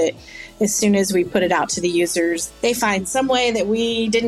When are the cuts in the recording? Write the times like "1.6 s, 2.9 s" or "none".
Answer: 2.5 s